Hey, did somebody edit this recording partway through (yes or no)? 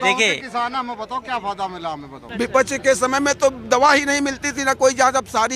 yes